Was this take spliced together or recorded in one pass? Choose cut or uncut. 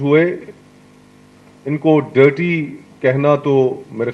uncut